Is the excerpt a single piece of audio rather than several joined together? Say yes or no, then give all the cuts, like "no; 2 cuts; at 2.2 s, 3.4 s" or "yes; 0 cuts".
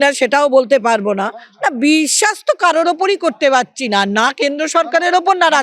no; 1 cut; at 1.4 s